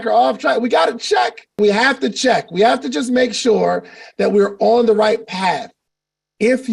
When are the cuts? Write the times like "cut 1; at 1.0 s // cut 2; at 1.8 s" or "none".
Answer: cut 1; at 1.6 s